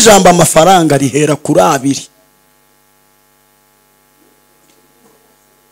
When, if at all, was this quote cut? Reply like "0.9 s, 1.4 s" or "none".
none